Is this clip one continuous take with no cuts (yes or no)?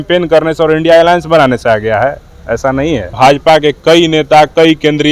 no